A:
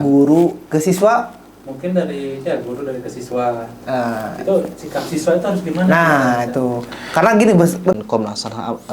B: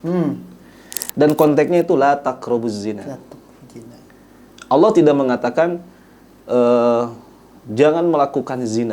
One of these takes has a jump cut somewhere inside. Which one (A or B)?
A